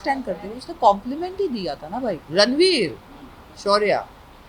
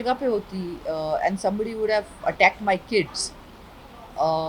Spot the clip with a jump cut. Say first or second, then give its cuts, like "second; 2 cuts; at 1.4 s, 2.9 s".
first; 1 cut; at 2.2 s